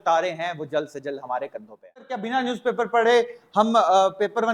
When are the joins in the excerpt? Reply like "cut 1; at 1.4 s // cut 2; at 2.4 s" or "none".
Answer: cut 1; at 2.2 s